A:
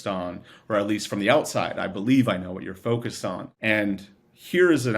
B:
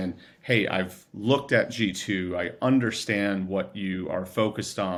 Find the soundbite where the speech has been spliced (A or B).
A